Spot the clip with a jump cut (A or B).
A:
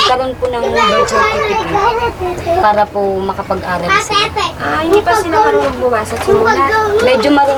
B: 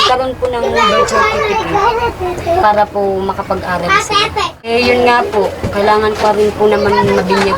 B